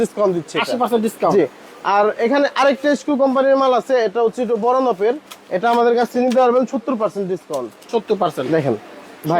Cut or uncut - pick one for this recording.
uncut